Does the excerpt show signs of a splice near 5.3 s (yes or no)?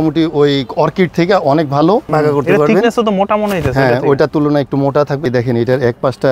yes